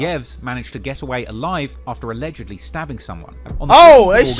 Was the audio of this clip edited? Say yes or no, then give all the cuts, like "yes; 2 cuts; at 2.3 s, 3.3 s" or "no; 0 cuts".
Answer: yes; 1 cut; at 3.4 s